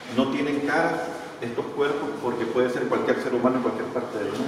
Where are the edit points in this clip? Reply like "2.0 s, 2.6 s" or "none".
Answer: none